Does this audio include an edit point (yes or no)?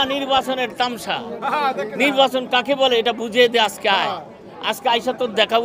no